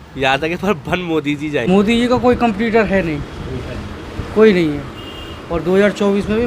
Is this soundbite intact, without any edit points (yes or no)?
no